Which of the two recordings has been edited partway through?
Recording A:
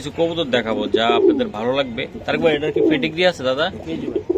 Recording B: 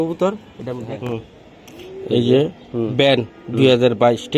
B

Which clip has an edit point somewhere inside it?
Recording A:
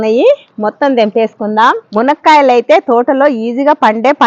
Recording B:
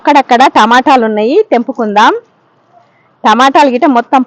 A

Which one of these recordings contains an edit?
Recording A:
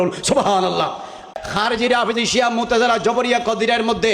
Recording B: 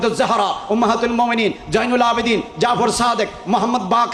A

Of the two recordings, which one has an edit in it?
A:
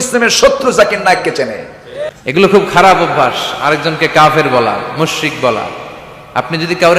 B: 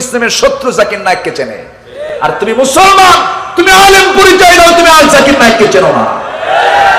A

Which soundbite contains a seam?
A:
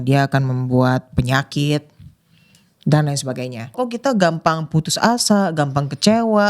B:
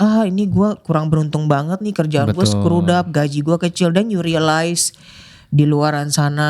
A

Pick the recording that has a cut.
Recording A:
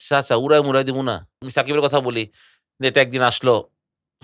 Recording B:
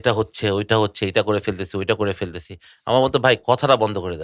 A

